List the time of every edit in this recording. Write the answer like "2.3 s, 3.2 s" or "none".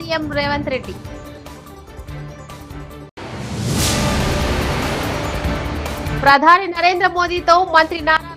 3.1 s, 6.1 s